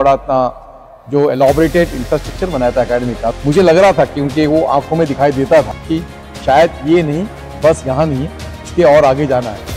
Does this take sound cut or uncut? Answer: cut